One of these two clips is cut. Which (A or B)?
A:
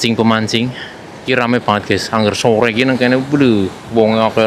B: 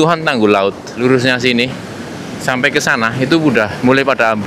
B